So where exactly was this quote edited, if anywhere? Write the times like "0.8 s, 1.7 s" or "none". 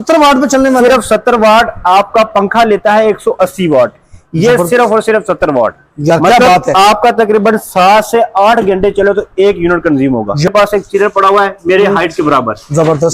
10.5 s